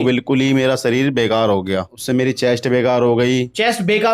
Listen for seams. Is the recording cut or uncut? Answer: cut